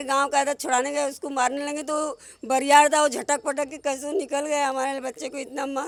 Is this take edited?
no; 0 cuts

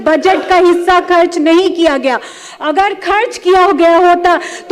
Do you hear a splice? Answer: no; 0 cuts

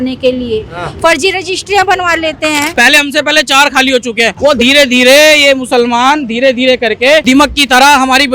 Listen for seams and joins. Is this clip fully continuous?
no; 3 cuts; at 2.7 s, 4.3 s, 7.2 s

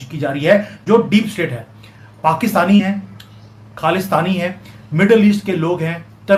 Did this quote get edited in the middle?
no; 0 cuts

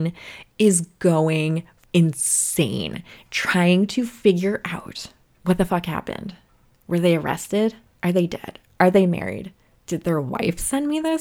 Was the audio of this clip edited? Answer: yes; 1 cut; at 1.7 s

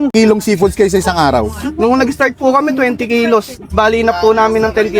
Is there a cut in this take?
no; 0 cuts

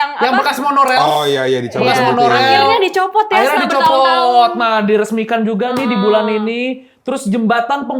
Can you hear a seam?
no; 0 cuts

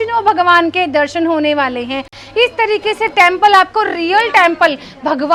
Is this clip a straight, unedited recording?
yes; 0 cuts

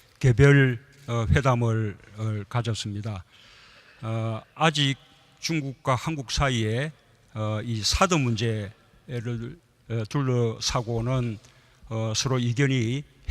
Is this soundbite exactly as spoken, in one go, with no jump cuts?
no; 1 cut; at 9.8 s

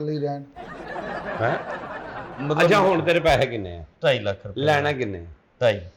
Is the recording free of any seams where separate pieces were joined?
no; 1 cut; at 2.2 s

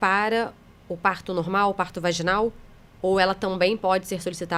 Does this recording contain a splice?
no; 0 cuts

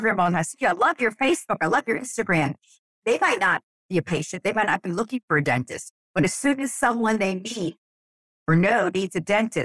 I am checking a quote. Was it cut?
yes; 1 cut; at 3.0 s

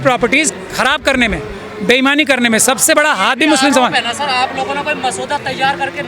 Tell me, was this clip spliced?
no; 0 cuts

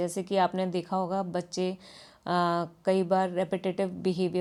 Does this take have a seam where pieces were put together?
no; 0 cuts

